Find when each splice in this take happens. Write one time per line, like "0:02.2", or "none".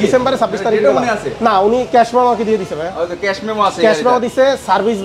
none